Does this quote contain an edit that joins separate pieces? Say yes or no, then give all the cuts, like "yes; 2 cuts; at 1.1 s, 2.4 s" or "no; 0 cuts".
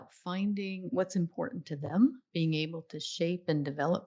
yes; 2 cuts; at 0.8 s, 2.2 s